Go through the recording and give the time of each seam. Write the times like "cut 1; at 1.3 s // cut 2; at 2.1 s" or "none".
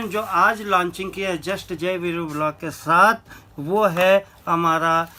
none